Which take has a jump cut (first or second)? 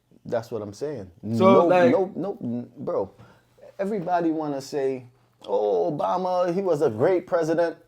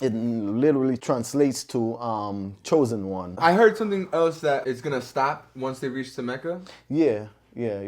second